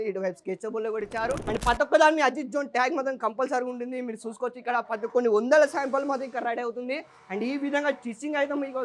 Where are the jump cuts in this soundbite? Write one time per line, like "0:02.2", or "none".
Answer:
0:01.4